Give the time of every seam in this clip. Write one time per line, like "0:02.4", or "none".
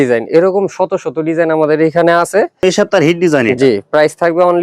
0:02.5